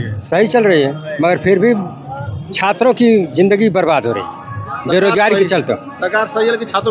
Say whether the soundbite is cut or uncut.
uncut